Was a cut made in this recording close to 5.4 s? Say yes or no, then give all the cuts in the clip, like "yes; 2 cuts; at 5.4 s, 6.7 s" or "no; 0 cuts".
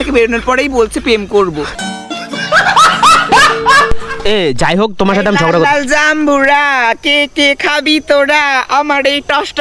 no; 1 cut; at 4.1 s